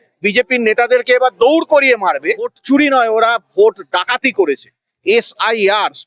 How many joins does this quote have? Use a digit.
1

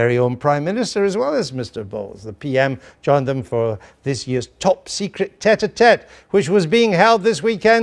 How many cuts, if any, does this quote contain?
1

